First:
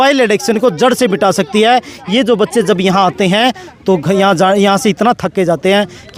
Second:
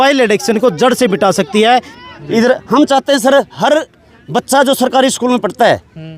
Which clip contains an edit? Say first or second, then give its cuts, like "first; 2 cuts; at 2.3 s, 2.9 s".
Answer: second; 1 cut; at 2.0 s